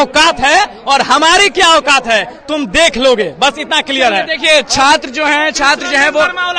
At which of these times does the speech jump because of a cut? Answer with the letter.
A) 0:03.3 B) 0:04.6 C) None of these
C